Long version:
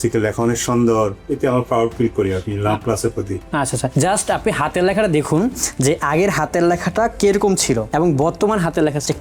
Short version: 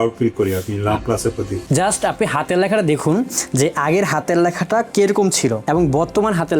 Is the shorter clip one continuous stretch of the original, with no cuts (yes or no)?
no